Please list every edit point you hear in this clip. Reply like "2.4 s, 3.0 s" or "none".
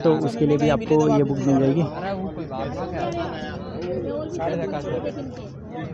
none